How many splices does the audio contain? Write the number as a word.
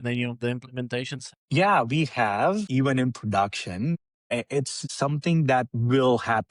three